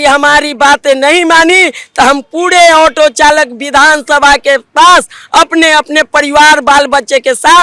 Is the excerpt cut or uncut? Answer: uncut